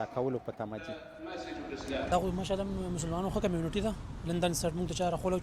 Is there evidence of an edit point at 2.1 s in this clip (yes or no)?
yes